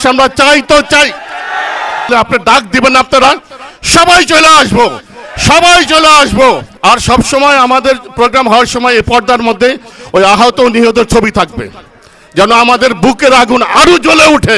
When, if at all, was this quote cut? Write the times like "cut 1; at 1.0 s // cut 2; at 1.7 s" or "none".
cut 1; at 2.1 s // cut 2; at 6.7 s